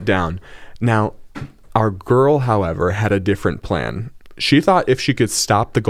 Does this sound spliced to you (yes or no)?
no